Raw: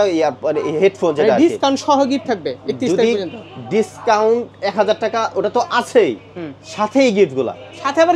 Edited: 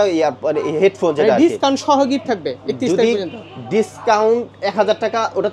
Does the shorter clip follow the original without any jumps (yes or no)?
yes